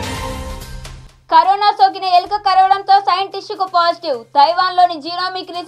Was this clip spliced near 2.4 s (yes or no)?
no